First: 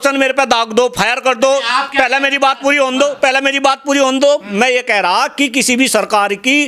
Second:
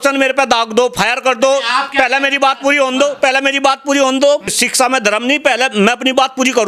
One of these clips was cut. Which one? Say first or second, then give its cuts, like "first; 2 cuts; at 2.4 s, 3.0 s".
second; 1 cut; at 4.5 s